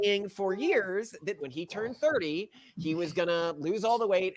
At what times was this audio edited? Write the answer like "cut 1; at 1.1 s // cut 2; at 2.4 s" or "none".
cut 1; at 1.4 s